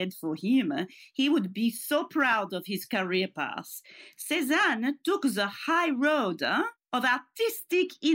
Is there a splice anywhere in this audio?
yes; 1 cut; at 6.8 s

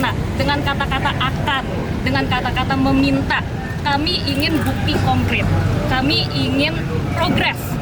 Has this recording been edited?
no; 0 cuts

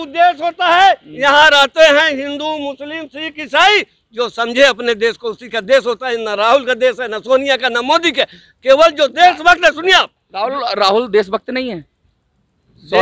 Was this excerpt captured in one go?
yes; 0 cuts

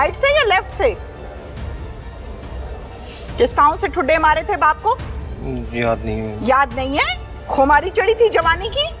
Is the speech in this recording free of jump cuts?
yes; 0 cuts

